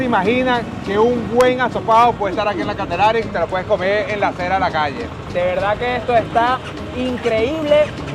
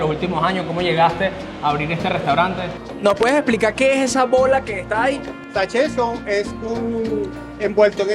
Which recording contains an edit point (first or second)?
second